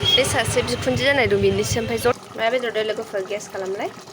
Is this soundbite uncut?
no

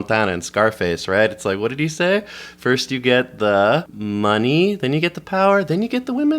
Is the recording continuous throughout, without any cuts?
no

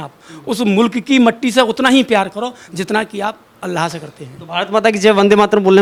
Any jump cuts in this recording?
no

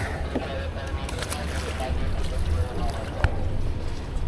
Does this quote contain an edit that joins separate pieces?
no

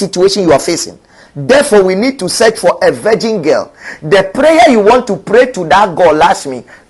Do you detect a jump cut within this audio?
no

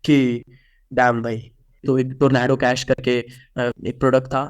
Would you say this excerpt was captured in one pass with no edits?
no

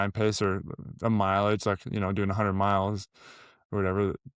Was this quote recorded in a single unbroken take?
yes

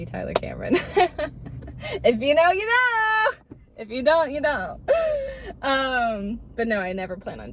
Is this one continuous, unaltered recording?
yes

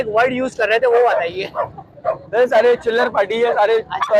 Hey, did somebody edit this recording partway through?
no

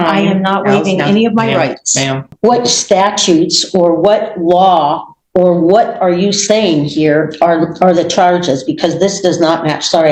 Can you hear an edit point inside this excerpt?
yes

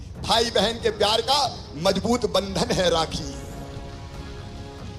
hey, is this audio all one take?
no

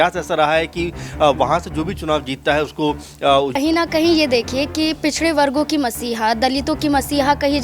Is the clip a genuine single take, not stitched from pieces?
no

